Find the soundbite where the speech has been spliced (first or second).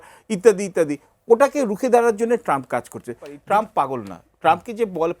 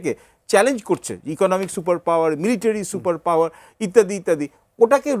first